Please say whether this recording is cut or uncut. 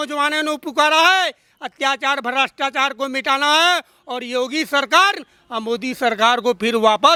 uncut